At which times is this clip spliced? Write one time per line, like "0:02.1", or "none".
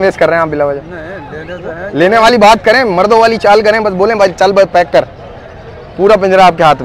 none